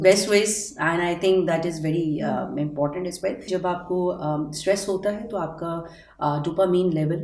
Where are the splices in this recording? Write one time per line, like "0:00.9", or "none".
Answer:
0:03.4